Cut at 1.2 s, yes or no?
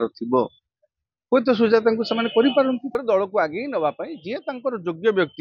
no